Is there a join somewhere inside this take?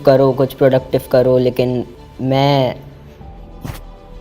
yes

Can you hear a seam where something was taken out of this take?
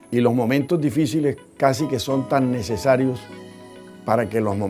no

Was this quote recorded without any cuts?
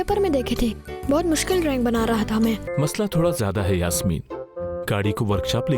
no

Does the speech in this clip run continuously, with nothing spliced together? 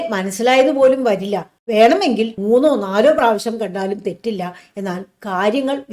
no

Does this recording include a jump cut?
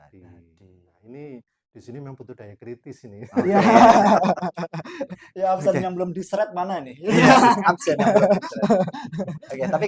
no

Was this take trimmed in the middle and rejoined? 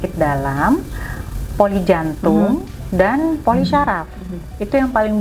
no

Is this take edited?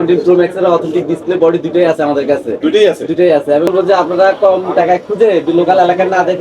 yes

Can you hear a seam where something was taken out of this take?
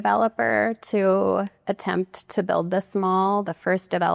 no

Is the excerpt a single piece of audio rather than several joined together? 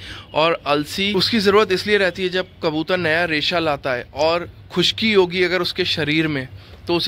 no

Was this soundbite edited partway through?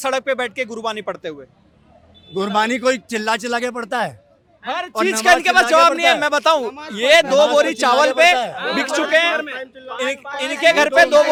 no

